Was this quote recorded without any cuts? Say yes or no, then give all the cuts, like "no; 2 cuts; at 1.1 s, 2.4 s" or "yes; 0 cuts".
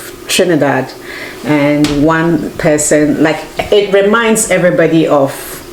yes; 0 cuts